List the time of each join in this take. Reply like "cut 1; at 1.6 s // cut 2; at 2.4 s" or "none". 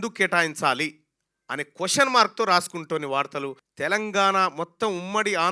cut 1; at 3.6 s